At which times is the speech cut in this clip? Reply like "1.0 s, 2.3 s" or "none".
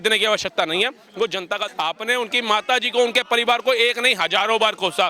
1.7 s